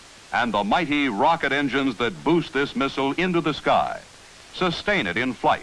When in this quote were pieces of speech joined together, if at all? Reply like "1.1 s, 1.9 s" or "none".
2.2 s